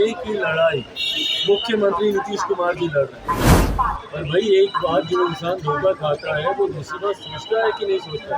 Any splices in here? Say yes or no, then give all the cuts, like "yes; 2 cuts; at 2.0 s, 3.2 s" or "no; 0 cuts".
yes; 1 cut; at 3.6 s